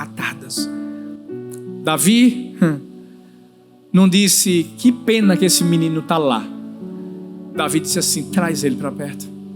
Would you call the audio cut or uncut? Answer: uncut